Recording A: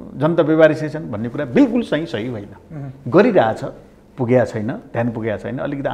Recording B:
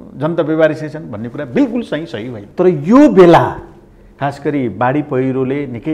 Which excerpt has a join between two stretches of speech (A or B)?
B